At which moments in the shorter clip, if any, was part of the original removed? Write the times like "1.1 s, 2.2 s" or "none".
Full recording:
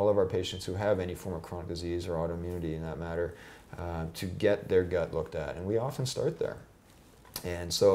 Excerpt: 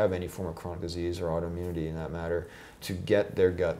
2.8 s